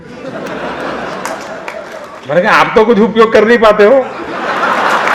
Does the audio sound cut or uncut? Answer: cut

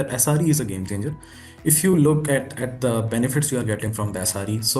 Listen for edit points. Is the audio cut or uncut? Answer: uncut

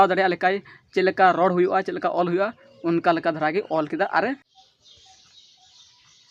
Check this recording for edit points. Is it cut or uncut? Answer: cut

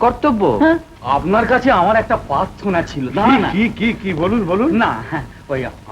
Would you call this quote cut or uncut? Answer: cut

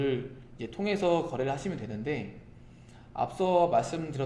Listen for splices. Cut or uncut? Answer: uncut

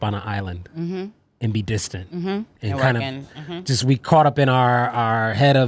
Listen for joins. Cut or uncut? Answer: uncut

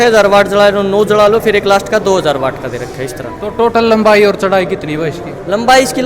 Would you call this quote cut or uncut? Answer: uncut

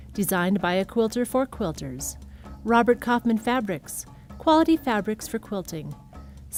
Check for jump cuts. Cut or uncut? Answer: uncut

